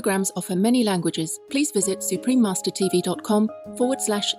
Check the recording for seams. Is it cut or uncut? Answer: cut